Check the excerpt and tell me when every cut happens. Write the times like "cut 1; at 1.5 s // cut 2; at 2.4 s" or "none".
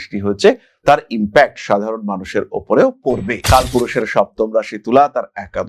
cut 1; at 3.4 s